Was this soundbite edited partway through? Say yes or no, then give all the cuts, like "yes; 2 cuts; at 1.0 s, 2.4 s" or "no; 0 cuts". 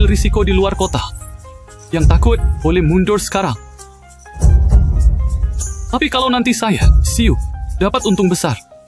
no; 0 cuts